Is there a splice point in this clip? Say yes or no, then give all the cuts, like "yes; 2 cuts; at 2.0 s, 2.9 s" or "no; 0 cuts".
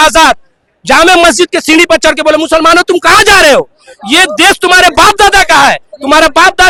no; 0 cuts